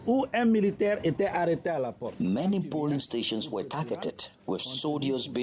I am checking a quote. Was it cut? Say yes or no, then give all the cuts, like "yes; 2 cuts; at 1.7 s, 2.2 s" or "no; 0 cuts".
no; 0 cuts